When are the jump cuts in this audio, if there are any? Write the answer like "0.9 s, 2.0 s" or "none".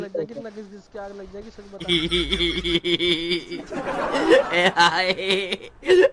1.8 s